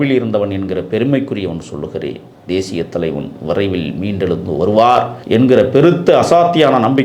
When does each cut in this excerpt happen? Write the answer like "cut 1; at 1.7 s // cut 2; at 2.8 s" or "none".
cut 1; at 5.2 s